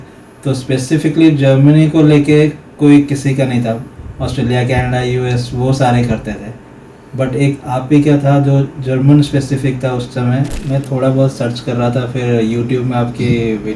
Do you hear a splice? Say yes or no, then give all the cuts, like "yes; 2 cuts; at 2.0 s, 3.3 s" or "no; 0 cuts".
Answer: yes; 1 cut; at 10.6 s